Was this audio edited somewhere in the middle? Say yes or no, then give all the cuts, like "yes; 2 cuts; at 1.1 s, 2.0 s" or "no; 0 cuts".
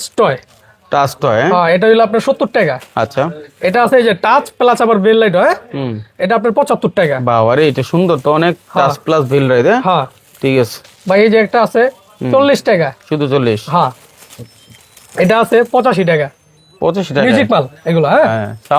no; 0 cuts